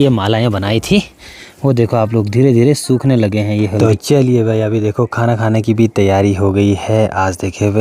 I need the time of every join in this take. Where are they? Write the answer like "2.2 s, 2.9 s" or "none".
3.8 s